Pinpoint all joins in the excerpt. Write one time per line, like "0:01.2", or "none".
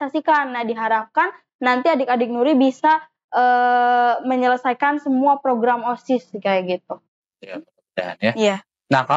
none